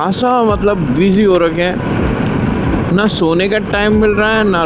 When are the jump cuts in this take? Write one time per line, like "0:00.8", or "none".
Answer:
none